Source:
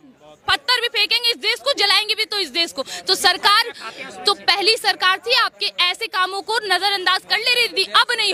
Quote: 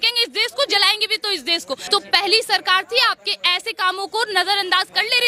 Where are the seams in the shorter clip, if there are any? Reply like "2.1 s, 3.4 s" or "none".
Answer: 1.8 s